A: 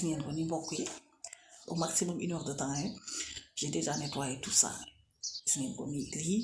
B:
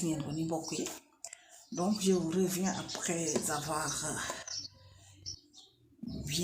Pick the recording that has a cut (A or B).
A